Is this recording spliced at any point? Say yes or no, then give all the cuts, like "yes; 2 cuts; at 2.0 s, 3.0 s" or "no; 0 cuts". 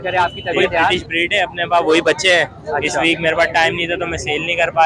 yes; 1 cut; at 1.0 s